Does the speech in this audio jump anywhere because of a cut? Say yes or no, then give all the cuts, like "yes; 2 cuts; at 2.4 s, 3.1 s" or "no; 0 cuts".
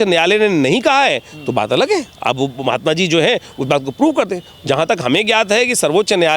no; 0 cuts